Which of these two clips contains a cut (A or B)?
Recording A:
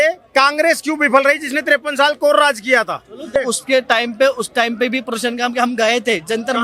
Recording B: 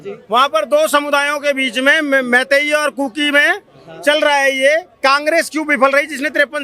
A